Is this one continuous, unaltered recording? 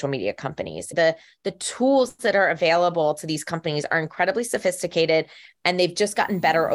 no; 1 cut; at 0.9 s

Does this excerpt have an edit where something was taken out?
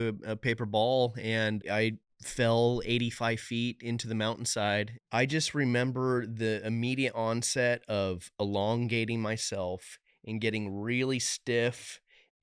yes; 2 cuts; at 1.6 s, 5.0 s

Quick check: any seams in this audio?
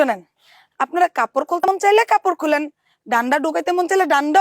yes; 1 cut; at 1.7 s

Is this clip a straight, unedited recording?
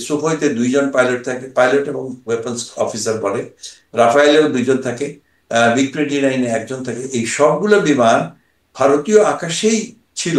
yes; 0 cuts

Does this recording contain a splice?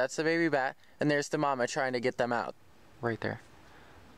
yes; 1 cut; at 2.5 s

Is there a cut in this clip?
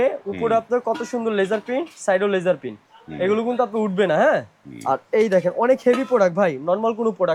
no; 0 cuts

